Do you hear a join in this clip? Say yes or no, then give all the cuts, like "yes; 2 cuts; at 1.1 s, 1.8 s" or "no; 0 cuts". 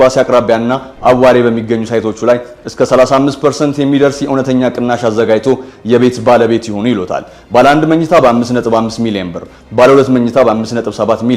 no; 0 cuts